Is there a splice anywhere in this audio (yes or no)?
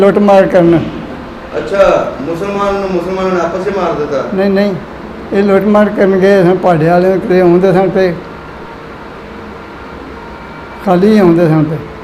no